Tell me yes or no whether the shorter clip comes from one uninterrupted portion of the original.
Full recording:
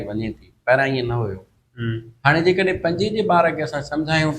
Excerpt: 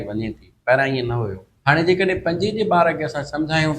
no